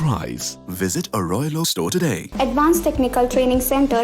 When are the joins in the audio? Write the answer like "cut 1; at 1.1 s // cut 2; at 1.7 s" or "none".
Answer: cut 1; at 2.2 s